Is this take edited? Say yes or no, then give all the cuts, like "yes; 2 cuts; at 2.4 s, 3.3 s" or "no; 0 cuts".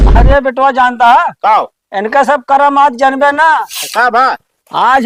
no; 0 cuts